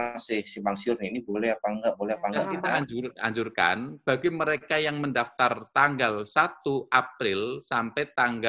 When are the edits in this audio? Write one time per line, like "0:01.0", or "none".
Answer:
0:02.5

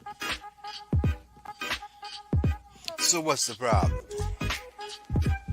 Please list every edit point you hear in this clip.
0:01.1

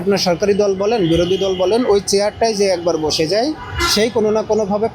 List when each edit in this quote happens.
none

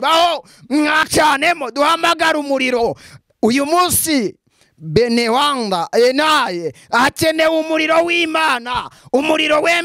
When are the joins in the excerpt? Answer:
0:01.1

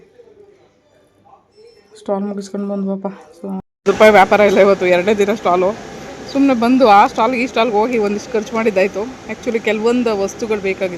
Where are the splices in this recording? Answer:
0:03.6

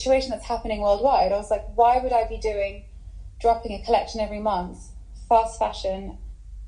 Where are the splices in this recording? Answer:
none

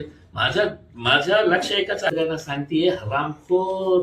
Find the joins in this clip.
0:02.1

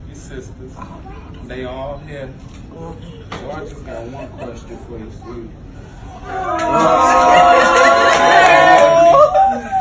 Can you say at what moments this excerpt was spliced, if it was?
none

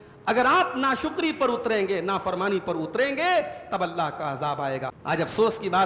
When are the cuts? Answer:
0:05.0

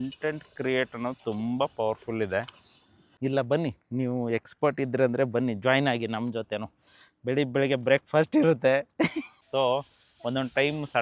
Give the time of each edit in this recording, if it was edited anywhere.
0:03.0
0:09.3

